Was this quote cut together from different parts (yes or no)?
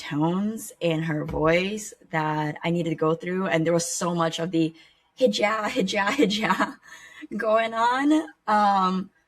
no